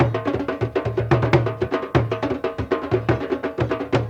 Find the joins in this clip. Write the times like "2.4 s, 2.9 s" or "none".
none

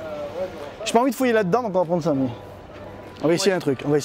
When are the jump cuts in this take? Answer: 3.0 s

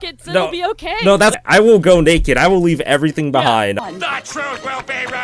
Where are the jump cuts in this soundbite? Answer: 1.3 s

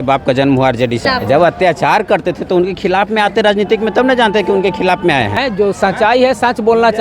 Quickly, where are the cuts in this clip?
1.0 s, 5.4 s

